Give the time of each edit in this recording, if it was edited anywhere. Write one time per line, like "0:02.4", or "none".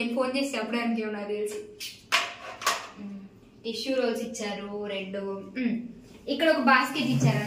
none